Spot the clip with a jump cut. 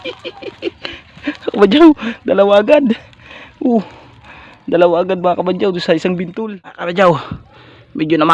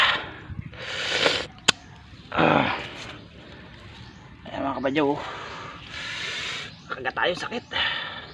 first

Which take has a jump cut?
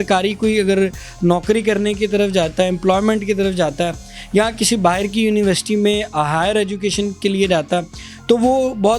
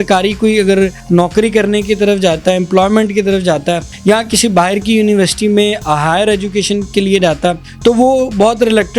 second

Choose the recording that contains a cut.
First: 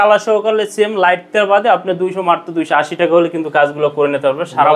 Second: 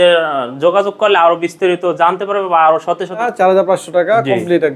second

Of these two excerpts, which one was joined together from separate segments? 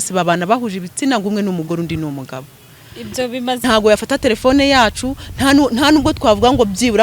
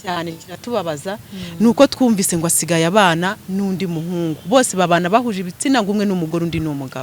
first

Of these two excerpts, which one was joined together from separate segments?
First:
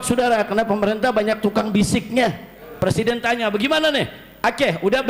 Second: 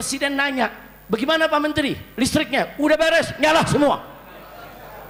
first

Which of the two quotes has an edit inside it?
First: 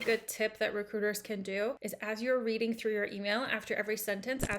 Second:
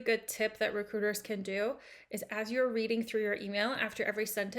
first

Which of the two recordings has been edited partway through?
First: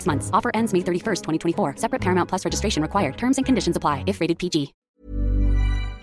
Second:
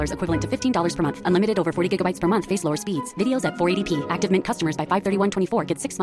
first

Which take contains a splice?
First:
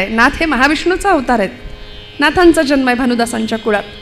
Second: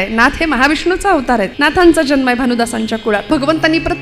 second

